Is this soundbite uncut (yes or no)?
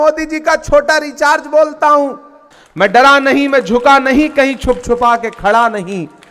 no